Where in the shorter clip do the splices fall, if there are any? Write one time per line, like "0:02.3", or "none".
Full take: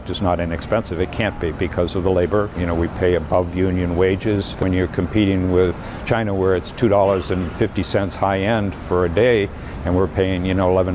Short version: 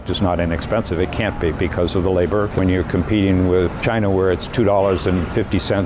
0:02.5
0:03.8